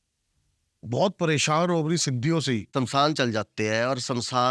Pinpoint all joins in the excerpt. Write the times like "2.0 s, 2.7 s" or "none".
2.7 s